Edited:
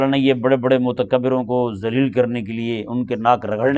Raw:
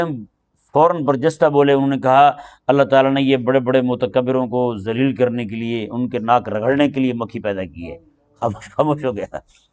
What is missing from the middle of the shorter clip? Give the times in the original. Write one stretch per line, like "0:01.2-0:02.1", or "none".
none